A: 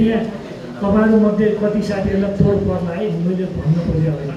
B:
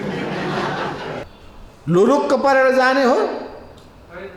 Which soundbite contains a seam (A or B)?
B